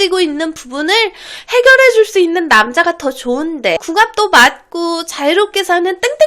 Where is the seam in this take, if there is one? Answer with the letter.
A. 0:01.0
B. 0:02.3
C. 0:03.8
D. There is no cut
C